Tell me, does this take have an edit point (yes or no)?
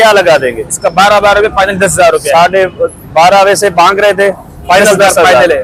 no